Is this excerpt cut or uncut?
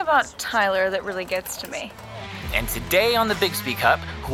cut